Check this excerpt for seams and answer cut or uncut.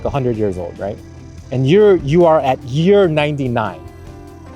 uncut